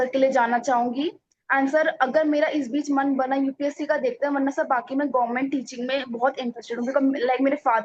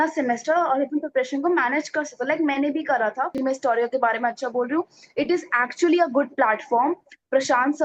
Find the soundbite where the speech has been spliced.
second; 1 cut; at 3.3 s

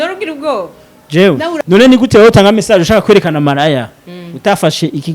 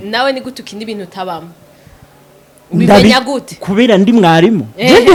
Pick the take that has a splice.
first; 1 cut; at 1.6 s

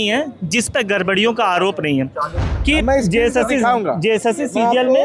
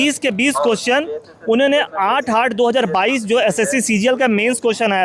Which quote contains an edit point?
first; 1 cut; at 2.4 s

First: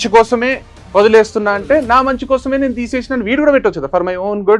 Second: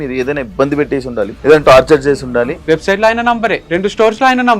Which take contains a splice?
second; 3 cuts; at 1.4 s, 2.5 s, 3.6 s

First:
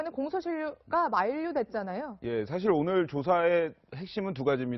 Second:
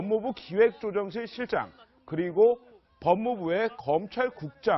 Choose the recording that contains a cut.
first; 1 cut; at 3.4 s

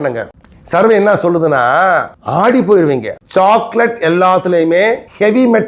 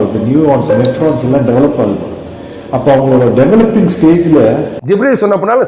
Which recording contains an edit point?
second; 1 cut; at 4.7 s

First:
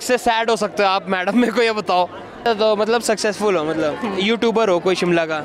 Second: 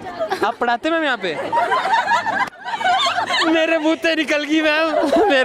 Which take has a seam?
first; 1 cut; at 2.5 s

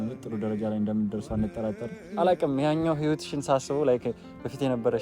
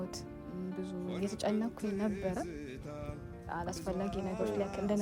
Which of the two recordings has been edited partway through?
first; 1 cut; at 2.0 s

